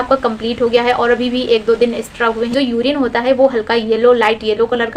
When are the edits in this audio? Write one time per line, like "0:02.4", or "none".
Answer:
0:02.5